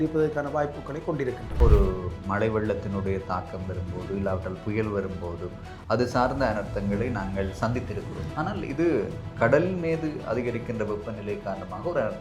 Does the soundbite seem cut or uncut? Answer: cut